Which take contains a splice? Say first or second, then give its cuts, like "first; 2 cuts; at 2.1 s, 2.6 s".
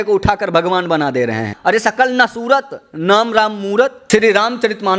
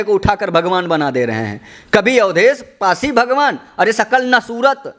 first; 2 cuts; at 1.5 s, 4.0 s